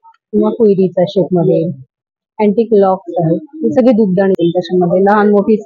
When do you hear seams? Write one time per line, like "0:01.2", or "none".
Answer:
0:04.4